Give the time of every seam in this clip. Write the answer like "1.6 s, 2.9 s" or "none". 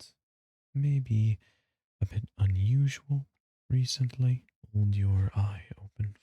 4.5 s